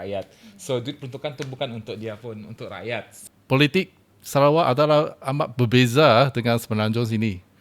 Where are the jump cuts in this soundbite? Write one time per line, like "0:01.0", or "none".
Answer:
0:03.1